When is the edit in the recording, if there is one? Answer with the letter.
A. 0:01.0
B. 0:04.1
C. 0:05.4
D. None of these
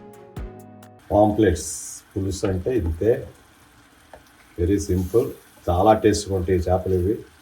A